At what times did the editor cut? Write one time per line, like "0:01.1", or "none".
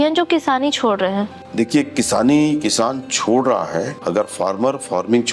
0:01.4
0:04.0